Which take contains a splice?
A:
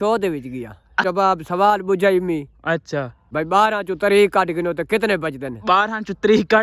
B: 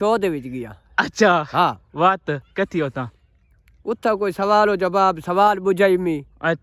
A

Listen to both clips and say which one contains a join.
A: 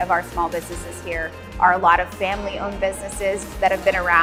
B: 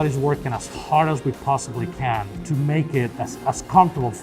B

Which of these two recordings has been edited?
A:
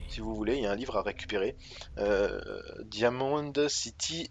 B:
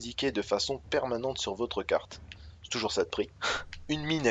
A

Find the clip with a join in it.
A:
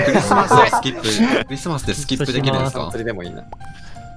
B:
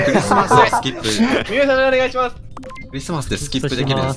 A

